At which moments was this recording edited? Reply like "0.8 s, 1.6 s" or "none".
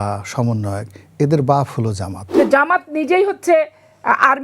2.2 s